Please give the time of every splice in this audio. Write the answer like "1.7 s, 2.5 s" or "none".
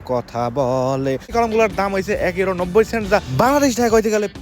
1.3 s